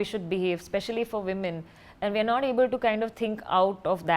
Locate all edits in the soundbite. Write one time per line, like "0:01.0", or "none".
none